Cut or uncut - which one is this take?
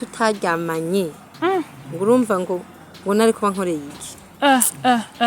uncut